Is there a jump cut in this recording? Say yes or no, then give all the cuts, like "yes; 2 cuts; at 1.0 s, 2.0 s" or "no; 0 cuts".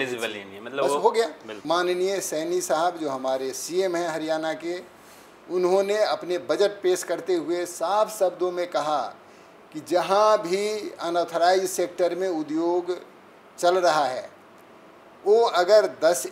yes; 1 cut; at 1.5 s